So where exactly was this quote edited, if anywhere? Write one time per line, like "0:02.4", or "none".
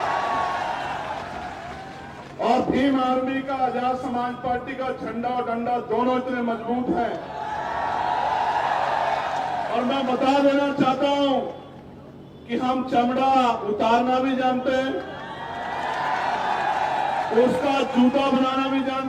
none